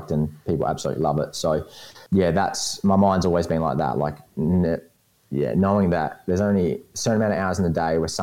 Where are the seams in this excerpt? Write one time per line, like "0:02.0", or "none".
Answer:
0:02.0